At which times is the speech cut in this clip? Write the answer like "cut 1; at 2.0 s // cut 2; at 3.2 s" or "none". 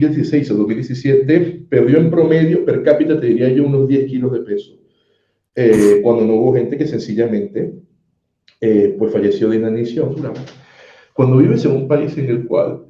cut 1; at 10.5 s